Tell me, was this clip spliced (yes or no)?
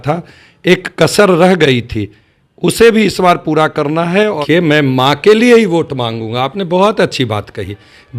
yes